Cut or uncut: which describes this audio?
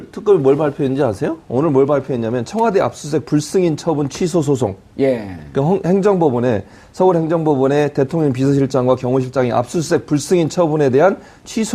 uncut